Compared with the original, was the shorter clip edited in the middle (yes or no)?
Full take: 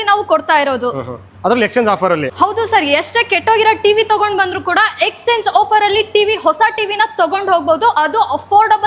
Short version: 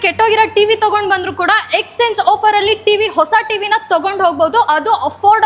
no